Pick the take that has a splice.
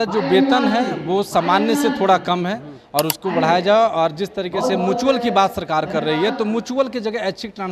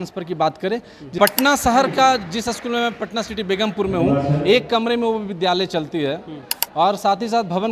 second; 1 cut; at 1.1 s

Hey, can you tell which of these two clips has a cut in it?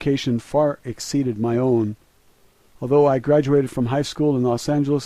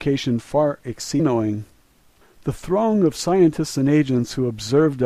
first; 1 cut; at 1.2 s

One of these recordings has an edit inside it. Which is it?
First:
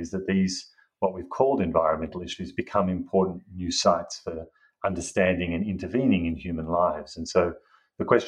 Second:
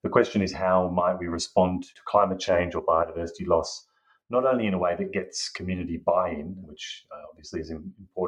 second; 2 cuts; at 1.9 s, 6.6 s

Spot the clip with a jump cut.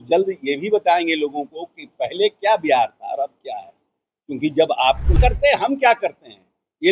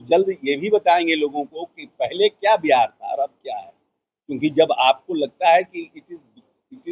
first; 1 cut; at 5.2 s

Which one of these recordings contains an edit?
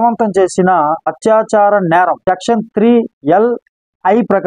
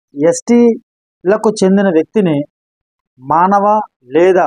first; 3 cuts; at 1.1 s, 2.2 s, 3.1 s

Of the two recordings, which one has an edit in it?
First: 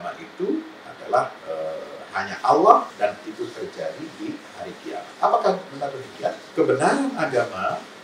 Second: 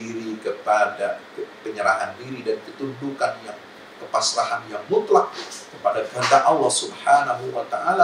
first; 3 cuts; at 1.4 s, 2.9 s, 6.4 s

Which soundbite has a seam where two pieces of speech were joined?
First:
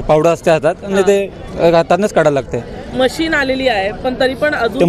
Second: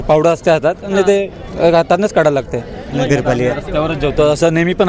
second; 1 cut; at 3.0 s

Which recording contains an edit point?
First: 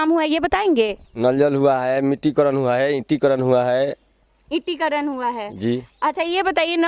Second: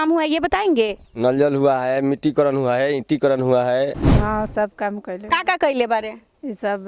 second; 1 cut; at 4.2 s

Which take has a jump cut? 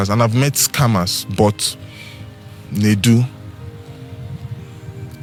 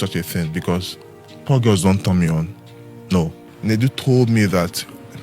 second; 1 cut; at 3.4 s

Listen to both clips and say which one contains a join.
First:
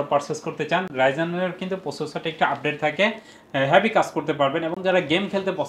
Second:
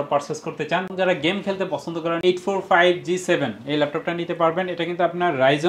second; 2 cuts; at 0.9 s, 2.2 s

